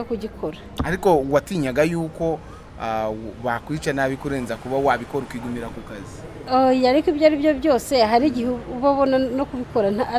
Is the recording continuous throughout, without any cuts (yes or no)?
yes